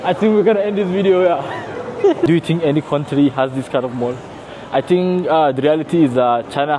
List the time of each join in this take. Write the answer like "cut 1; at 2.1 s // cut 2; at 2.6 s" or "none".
cut 1; at 2.3 s